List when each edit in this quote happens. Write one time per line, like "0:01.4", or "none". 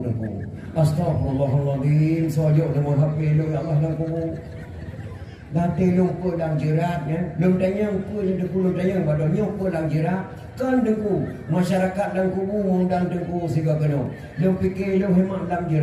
none